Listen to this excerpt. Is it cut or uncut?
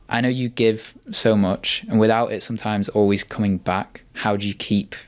uncut